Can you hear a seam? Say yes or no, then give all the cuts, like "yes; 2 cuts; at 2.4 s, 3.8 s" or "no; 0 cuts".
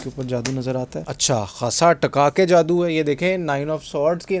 yes; 1 cut; at 1.1 s